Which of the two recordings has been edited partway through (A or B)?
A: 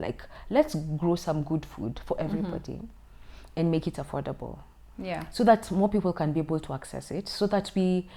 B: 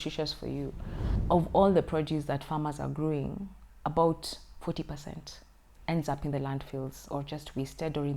B